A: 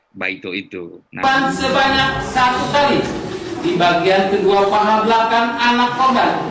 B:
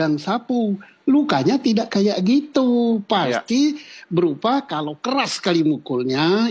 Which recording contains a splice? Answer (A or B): A